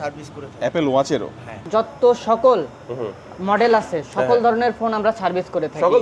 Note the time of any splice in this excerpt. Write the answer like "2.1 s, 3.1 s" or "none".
1.6 s